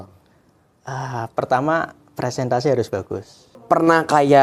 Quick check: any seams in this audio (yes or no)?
yes